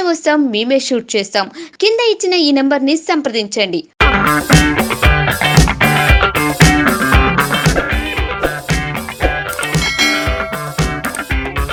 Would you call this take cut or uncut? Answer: uncut